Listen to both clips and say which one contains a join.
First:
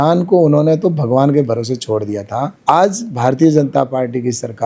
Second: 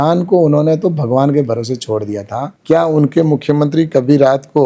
second; 1 cut; at 2.5 s

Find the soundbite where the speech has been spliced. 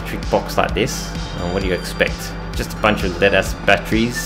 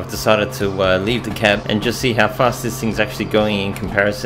second; 1 cut; at 1.6 s

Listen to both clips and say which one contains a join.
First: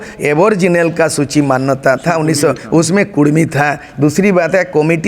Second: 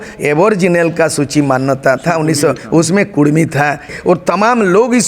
second; 1 cut; at 3.9 s

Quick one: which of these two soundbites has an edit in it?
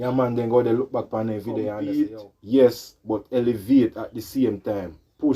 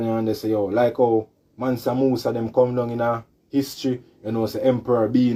first; 1 cut; at 1.8 s

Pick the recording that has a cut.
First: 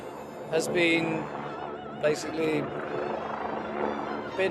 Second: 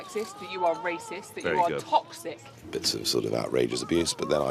second; 1 cut; at 2.5 s

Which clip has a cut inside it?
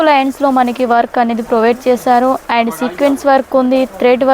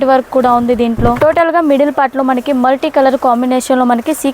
second; 1 cut; at 1.2 s

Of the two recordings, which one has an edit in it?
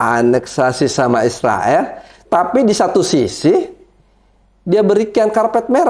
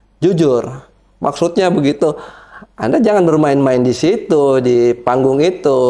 first; 1 cut; at 2.2 s

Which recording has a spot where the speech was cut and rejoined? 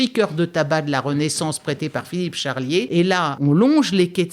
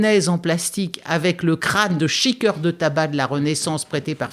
first; 1 cut; at 3.0 s

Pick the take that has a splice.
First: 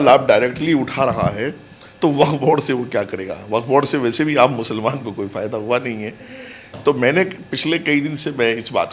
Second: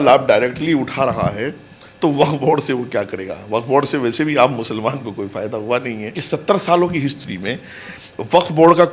second; 1 cut; at 6.2 s

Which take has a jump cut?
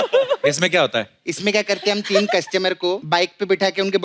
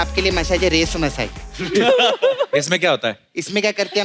first; 1 cut; at 3.0 s

